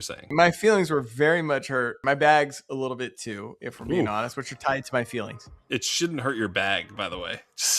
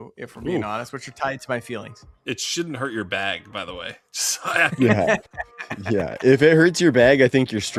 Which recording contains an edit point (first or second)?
first